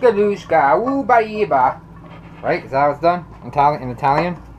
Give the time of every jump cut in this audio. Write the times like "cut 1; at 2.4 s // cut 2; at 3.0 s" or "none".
none